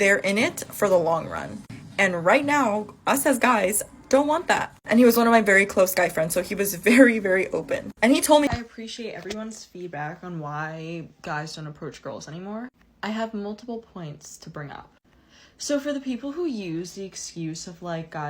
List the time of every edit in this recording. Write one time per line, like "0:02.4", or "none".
0:08.5